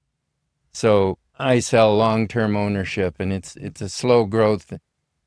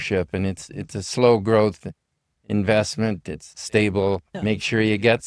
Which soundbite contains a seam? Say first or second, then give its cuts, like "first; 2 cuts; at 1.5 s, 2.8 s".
second; 1 cut; at 4.3 s